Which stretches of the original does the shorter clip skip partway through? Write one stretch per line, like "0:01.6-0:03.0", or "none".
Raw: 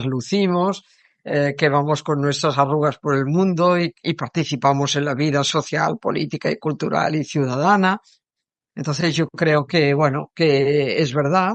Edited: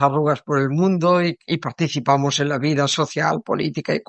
none